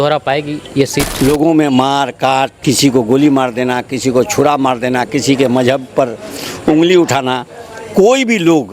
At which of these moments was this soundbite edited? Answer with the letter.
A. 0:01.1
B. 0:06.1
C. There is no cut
A